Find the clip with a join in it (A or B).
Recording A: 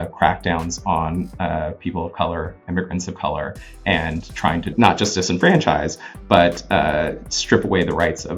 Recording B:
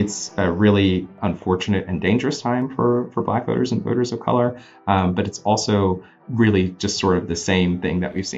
B